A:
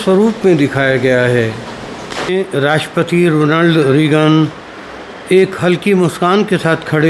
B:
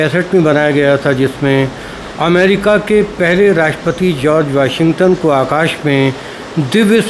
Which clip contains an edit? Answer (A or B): A